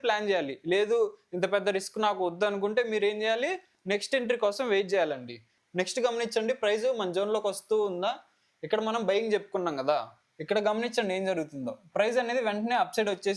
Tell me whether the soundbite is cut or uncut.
uncut